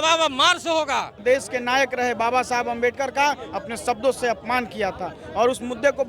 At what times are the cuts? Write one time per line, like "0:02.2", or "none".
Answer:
0:01.2